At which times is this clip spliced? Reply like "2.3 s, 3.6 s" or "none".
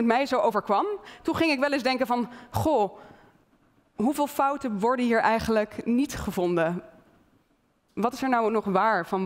1.1 s